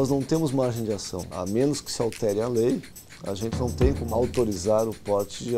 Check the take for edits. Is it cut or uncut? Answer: cut